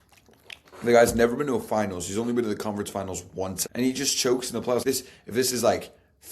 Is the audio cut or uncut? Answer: cut